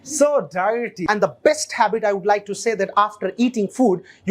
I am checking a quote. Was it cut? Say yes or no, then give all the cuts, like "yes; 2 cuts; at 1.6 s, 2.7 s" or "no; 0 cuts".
yes; 1 cut; at 1.0 s